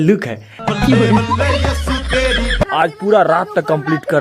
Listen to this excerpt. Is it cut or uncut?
cut